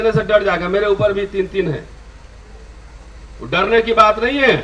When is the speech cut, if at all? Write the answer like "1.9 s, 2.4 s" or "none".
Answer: none